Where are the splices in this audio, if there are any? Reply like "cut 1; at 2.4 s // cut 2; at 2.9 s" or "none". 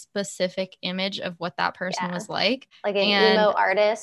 cut 1; at 2.7 s